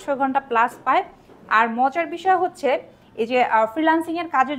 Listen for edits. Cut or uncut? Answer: uncut